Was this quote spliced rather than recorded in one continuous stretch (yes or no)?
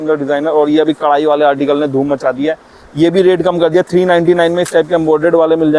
no